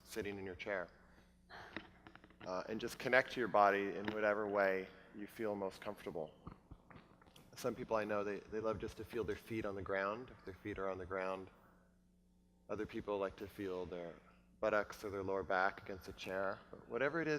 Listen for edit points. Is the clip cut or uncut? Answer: cut